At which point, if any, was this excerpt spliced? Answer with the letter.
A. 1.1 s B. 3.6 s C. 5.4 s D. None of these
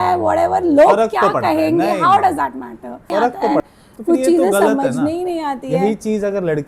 B